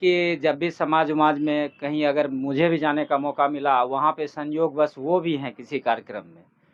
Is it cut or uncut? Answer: uncut